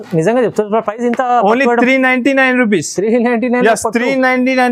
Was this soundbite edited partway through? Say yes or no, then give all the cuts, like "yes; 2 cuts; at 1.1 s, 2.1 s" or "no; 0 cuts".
no; 0 cuts